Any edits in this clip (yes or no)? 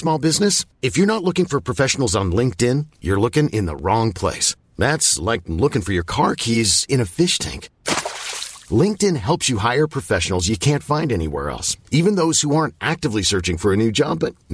no